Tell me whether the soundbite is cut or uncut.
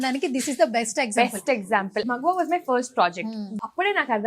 cut